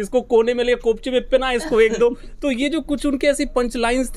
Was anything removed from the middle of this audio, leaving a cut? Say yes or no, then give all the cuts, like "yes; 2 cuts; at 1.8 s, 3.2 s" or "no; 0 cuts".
no; 0 cuts